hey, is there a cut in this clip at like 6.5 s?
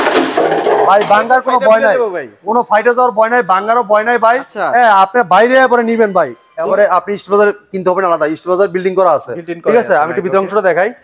yes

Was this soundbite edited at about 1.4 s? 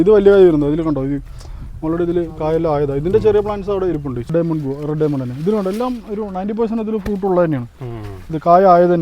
no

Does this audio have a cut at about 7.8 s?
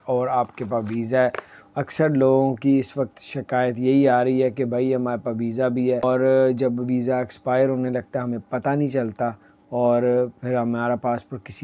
no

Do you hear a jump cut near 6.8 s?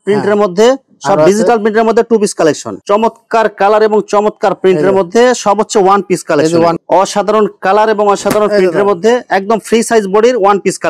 yes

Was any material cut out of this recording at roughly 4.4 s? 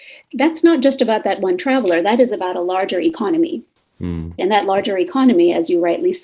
yes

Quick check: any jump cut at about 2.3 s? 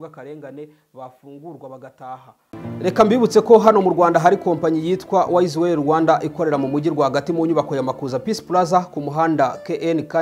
yes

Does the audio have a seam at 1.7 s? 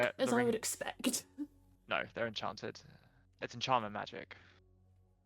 yes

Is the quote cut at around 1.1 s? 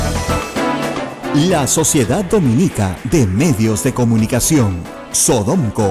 yes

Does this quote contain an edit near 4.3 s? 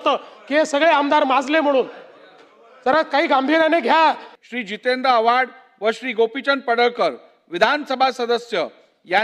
yes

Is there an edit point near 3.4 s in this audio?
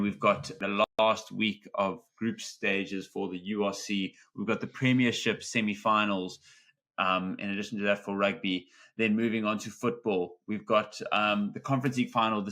no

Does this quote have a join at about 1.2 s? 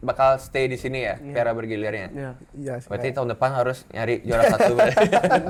no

